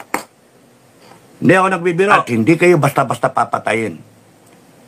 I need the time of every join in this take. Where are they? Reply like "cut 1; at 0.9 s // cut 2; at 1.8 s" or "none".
cut 1; at 2.2 s